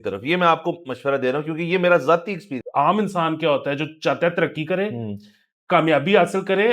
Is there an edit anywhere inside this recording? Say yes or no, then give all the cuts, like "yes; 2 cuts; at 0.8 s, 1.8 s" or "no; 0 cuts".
yes; 1 cut; at 2.5 s